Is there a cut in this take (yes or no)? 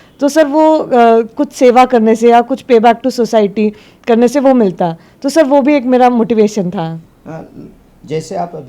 no